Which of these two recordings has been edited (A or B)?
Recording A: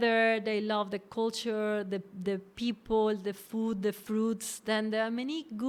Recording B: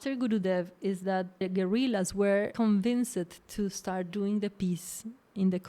B